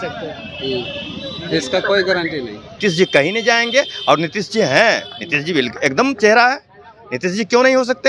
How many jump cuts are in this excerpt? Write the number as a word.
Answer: one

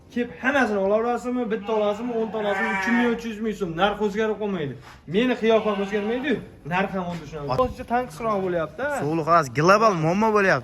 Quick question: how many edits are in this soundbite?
one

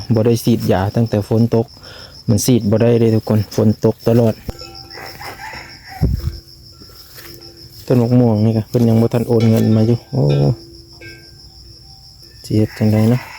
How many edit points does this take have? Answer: one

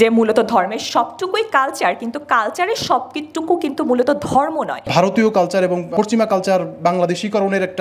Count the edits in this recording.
one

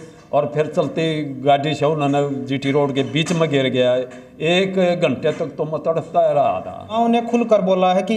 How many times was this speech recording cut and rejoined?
one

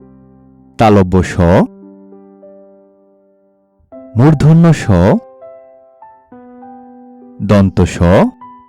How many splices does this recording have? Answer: zero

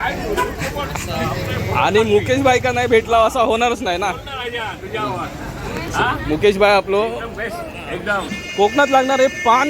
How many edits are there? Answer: one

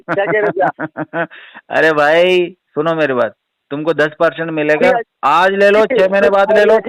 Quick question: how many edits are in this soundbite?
zero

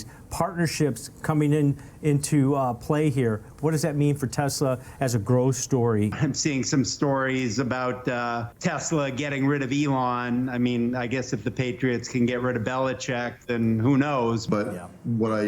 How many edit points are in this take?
two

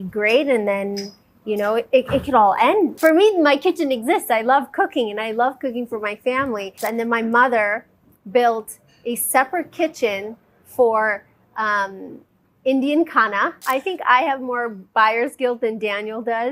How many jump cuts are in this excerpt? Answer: three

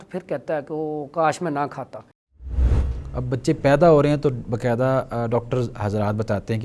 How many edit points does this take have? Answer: one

